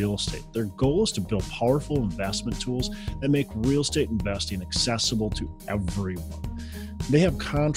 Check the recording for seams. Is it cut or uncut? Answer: uncut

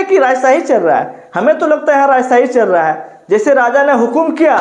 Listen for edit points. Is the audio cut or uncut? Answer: uncut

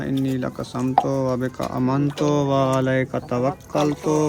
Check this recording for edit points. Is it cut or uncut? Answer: uncut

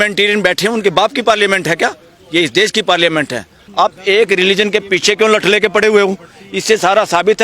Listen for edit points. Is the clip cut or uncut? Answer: cut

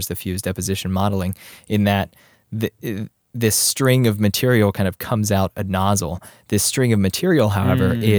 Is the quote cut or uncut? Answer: uncut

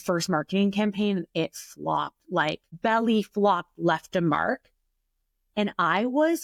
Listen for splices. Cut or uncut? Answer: uncut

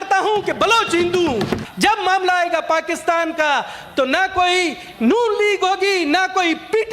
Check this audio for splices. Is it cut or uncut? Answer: cut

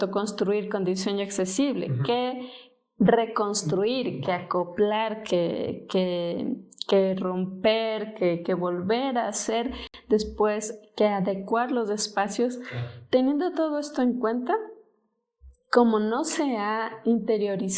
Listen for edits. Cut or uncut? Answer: uncut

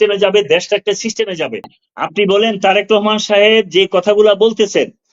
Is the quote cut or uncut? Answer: cut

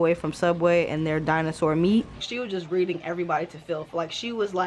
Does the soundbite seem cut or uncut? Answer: cut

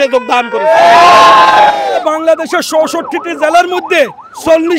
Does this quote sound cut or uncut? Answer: cut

